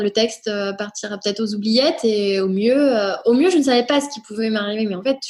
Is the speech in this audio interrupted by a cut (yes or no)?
no